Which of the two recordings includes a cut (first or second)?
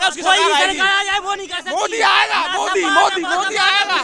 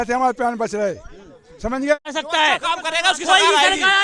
second